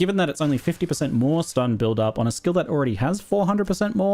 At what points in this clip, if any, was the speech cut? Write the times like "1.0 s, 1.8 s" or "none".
2.7 s